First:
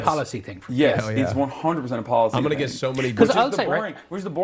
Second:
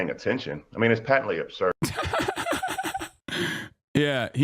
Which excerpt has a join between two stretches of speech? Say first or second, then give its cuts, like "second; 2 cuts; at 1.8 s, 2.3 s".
second; 2 cuts; at 1.8 s, 3.2 s